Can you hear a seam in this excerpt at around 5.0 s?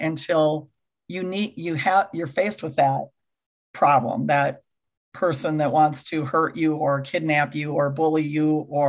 no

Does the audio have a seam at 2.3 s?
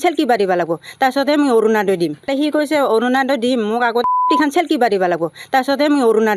yes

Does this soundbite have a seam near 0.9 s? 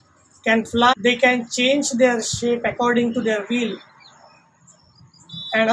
yes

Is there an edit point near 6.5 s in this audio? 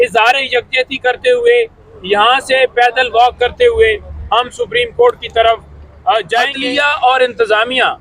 yes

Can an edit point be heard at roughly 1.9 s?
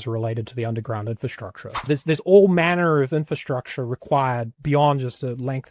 yes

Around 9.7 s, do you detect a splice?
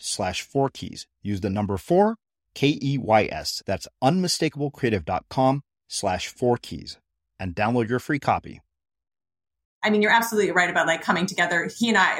yes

